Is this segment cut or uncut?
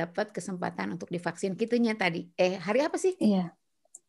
uncut